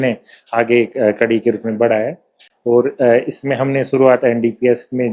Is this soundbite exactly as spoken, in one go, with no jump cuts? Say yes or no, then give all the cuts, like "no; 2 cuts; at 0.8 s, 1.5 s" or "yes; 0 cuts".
yes; 0 cuts